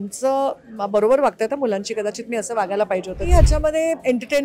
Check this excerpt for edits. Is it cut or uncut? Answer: cut